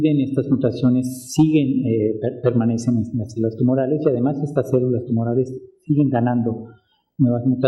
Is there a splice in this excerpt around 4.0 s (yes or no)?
no